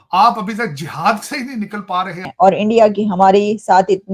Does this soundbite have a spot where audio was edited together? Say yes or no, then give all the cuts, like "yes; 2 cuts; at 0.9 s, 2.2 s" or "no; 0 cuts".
yes; 1 cut; at 2.3 s